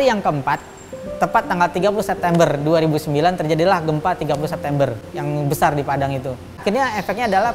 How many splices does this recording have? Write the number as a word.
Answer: one